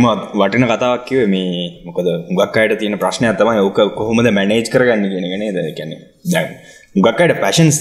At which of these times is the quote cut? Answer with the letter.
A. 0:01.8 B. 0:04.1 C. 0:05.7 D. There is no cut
D